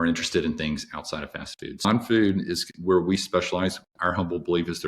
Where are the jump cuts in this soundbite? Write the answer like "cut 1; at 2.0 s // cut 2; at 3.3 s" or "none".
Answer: cut 1; at 1.8 s